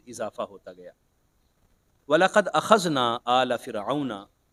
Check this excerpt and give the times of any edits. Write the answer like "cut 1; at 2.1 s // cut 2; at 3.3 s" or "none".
none

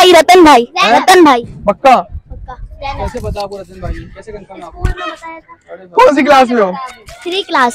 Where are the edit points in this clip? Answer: none

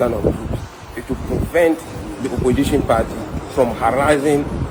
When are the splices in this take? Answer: none

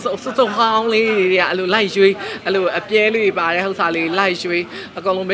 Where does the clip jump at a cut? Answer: none

